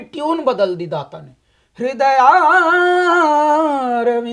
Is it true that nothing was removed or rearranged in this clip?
yes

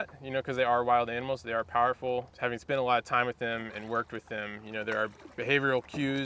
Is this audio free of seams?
yes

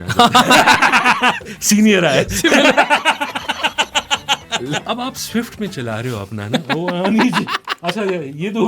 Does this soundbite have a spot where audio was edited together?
yes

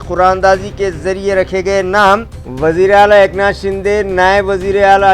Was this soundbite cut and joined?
no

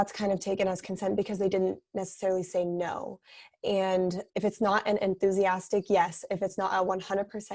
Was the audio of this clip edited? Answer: yes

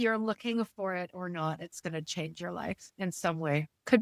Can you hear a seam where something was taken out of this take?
no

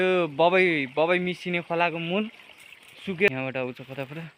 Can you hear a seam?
yes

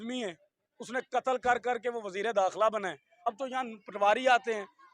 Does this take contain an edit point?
yes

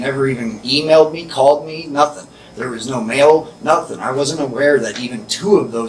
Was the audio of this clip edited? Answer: no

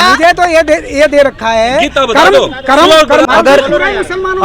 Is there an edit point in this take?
yes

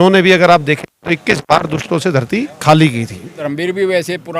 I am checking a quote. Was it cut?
yes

